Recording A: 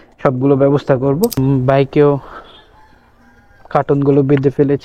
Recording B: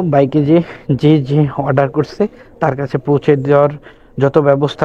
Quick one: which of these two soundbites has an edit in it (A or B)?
A